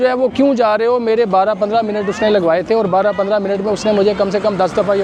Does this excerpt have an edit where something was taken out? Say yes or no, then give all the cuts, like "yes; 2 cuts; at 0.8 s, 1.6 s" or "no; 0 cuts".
no; 0 cuts